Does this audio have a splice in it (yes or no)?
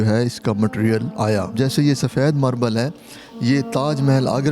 yes